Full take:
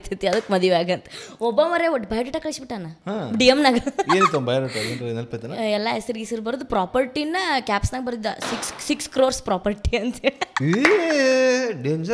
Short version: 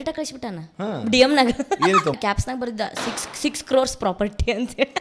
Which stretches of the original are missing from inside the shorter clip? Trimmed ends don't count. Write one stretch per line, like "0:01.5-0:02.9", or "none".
0:04.4-0:07.6